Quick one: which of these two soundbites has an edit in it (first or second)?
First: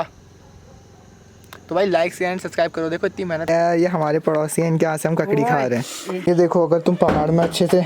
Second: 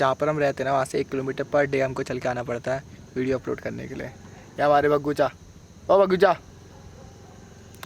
first